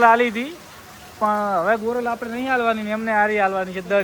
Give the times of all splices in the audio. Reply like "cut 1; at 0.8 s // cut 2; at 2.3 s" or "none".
none